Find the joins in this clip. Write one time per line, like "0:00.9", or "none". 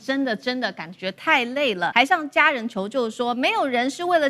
0:01.9